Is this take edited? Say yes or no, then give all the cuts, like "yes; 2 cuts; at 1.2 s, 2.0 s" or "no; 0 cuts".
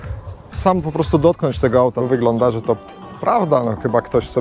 yes; 1 cut; at 2.0 s